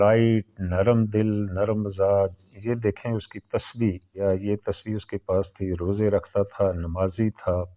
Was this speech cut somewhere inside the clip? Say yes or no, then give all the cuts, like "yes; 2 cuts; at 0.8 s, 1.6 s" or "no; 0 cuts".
yes; 1 cut; at 4.1 s